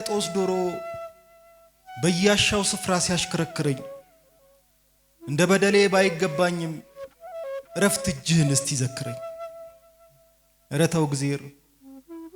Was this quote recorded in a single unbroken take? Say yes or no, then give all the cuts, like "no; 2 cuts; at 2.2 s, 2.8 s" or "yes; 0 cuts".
yes; 0 cuts